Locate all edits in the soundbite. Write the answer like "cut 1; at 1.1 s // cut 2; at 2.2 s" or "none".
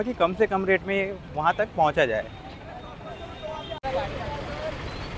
none